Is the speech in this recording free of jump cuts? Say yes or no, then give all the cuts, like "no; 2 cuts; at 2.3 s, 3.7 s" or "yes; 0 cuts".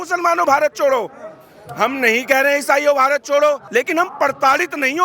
no; 1 cut; at 3.6 s